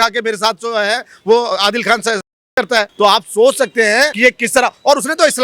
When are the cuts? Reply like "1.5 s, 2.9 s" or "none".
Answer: 2.9 s, 4.1 s